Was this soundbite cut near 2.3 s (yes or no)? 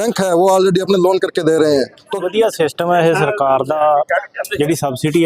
yes